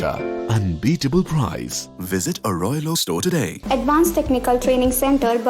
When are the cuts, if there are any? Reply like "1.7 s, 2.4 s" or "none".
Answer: 3.6 s

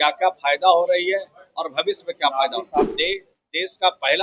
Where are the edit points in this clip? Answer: 2.9 s

